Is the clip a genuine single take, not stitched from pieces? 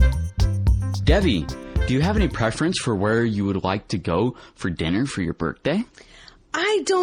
no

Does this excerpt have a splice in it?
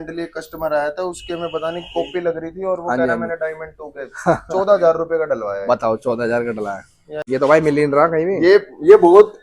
yes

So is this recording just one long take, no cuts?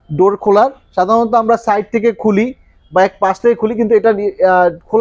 yes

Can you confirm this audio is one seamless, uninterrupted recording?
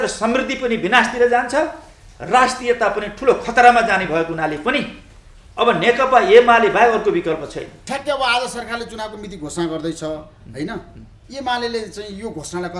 no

